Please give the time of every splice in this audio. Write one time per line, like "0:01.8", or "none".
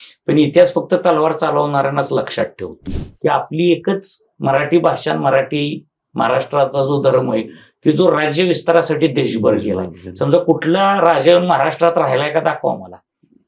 0:03.0